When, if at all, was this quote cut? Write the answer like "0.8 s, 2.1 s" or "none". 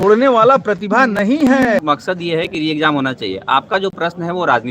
1.8 s

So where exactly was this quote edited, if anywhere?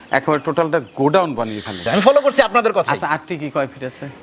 1.8 s

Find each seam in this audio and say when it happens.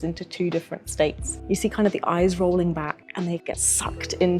1.3 s, 3.4 s

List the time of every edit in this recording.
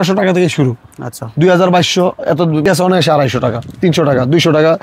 2.7 s

